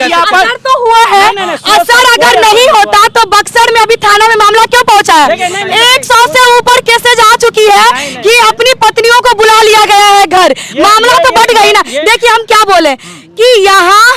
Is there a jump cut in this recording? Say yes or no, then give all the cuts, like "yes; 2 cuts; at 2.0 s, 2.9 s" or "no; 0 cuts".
no; 0 cuts